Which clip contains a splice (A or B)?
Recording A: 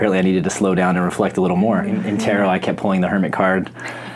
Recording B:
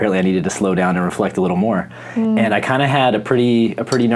A